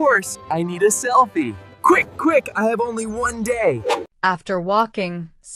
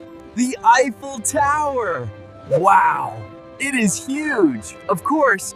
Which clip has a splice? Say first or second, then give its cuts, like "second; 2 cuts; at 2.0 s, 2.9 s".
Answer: first; 1 cut; at 4.1 s